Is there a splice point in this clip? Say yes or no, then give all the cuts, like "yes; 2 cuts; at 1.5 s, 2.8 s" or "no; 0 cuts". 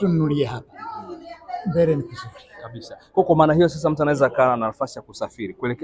no; 0 cuts